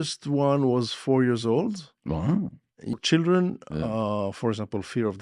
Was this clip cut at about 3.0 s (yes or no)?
yes